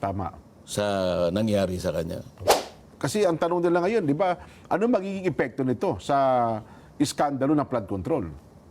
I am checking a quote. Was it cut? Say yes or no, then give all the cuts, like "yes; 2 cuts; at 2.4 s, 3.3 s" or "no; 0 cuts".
yes; 1 cut; at 2.3 s